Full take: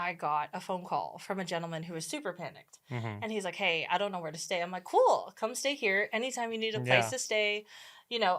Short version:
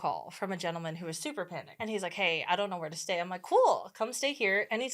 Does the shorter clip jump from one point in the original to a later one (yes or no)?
yes